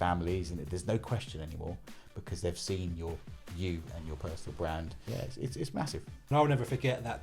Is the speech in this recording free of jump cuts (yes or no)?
no